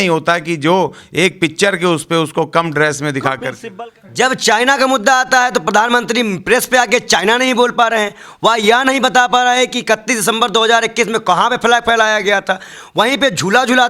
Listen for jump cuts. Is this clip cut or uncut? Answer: cut